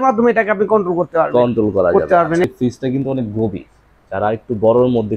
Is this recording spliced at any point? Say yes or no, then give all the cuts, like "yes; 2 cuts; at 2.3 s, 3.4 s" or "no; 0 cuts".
yes; 1 cut; at 2.4 s